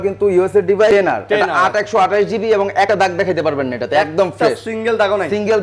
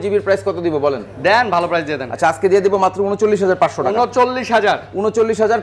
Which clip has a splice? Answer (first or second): first